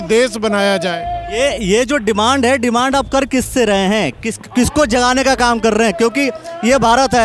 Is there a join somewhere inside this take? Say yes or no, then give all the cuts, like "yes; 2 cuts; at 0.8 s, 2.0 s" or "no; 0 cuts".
no; 0 cuts